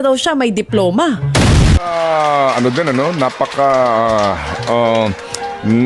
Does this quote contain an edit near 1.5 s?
yes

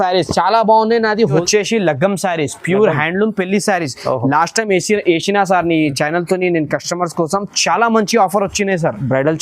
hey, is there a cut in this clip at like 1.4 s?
yes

